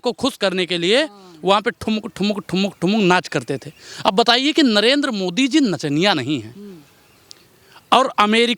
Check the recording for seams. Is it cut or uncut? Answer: uncut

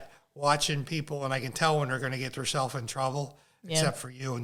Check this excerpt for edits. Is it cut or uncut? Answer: uncut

